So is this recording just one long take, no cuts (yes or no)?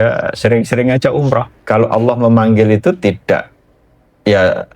no